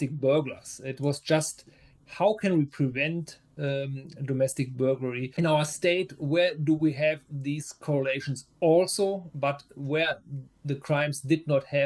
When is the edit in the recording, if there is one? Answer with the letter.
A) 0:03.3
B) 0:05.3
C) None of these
B